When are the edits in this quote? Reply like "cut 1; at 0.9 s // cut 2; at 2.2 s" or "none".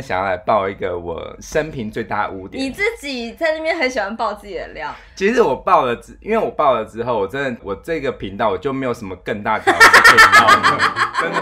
cut 1; at 1.3 s // cut 2; at 7.6 s